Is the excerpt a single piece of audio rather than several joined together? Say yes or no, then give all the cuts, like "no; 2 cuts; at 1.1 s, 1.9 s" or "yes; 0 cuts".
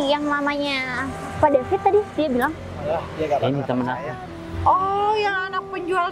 yes; 0 cuts